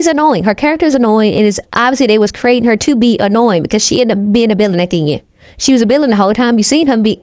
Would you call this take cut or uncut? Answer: uncut